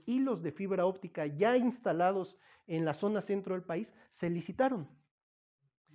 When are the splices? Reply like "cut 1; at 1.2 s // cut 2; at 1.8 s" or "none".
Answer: none